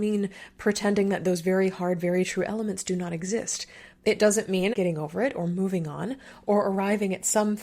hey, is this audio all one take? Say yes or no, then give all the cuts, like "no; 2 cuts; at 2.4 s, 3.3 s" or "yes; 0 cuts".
no; 1 cut; at 4.7 s